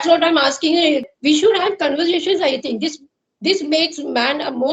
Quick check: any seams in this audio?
yes; 1 cut; at 1.0 s

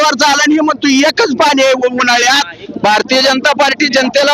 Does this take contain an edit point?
yes; 1 cut; at 2.6 s

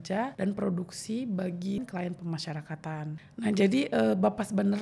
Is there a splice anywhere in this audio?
yes; 2 cuts; at 1.8 s, 3.2 s

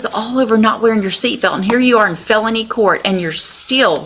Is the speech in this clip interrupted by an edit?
no; 0 cuts

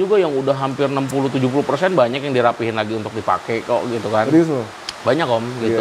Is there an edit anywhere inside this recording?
no; 0 cuts

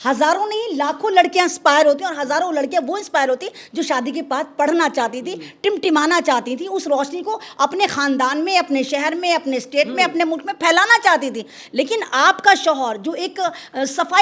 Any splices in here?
no; 0 cuts

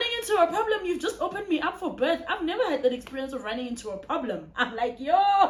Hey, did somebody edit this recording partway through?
no; 0 cuts

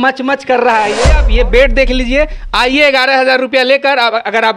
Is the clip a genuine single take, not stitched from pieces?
no; 1 cut; at 1.2 s

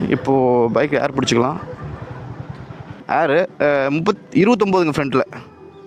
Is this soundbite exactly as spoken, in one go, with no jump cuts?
yes; 0 cuts

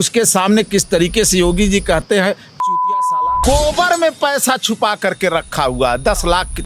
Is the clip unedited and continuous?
no; 1 cut; at 3.4 s

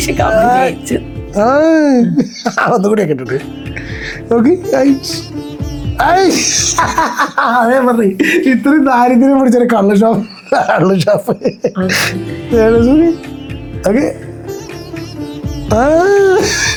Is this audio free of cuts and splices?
yes; 0 cuts

